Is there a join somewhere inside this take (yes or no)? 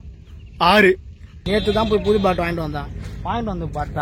yes